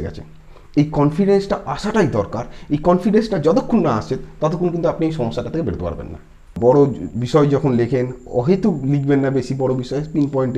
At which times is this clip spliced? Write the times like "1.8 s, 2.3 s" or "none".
6.6 s